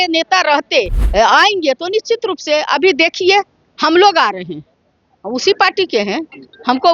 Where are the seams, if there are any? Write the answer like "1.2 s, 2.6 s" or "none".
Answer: 1.0 s